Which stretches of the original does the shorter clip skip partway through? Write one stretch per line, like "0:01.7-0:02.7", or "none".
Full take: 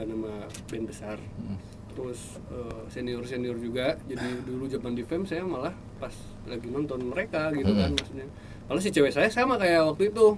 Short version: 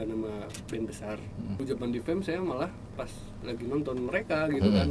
0:01.6-0:04.6

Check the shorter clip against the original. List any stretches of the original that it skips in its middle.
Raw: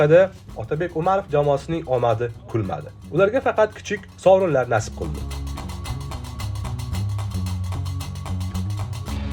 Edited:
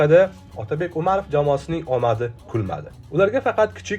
none

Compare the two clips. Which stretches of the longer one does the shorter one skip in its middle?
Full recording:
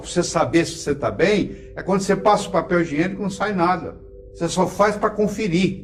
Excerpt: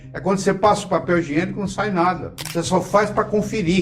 0:04.0-0:04.2

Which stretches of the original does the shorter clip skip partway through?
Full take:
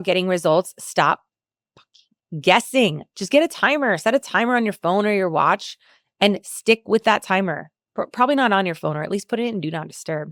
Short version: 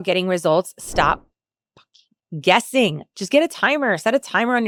none

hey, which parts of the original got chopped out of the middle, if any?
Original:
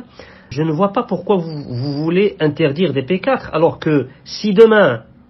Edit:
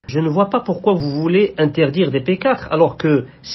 0:01.5-0:01.9

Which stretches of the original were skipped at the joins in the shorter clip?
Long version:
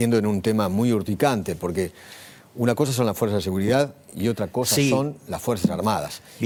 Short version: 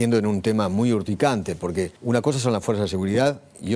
0:02.0-0:02.5

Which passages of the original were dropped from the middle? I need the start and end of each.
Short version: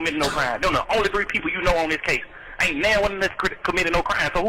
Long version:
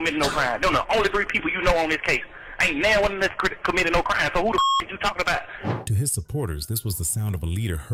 none

